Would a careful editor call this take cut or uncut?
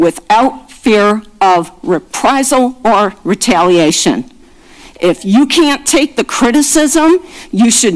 uncut